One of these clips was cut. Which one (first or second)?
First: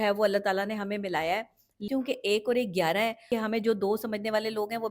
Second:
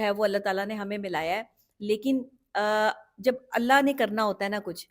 first